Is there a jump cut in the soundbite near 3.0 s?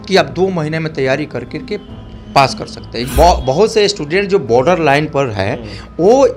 yes; 1 cut; at 3.0 s

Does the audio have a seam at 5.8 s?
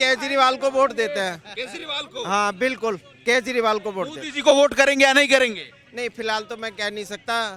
no; 0 cuts

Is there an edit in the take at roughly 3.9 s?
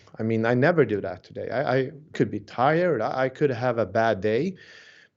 no; 1 cut; at 2.1 s

